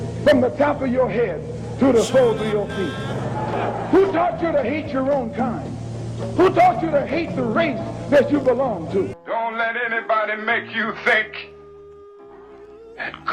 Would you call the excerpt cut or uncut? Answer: cut